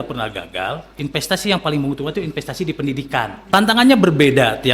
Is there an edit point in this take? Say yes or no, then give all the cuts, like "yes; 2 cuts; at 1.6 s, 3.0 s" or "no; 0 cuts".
yes; 1 cut; at 3.4 s